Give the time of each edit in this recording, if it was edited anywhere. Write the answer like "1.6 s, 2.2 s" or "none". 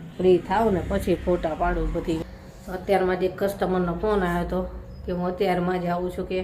2.2 s